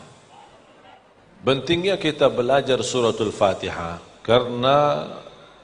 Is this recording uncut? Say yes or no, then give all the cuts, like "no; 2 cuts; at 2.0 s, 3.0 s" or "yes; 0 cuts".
no; 1 cut; at 1.2 s